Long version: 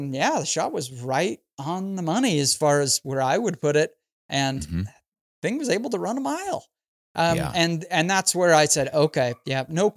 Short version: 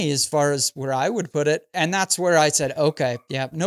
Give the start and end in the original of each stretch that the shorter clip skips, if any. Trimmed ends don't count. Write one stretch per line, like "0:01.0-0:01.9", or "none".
0:04.0-0:07.8